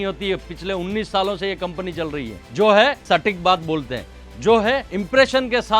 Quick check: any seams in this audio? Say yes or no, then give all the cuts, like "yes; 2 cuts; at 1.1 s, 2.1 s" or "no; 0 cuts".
yes; 3 cuts; at 2.4 s, 3.0 s, 4.9 s